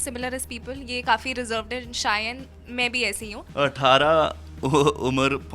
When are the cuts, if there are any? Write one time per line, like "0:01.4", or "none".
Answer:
0:03.4